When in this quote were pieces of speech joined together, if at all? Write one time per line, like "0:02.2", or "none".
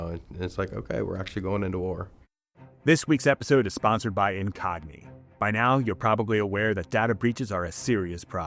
none